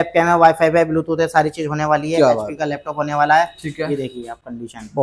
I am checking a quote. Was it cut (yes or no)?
no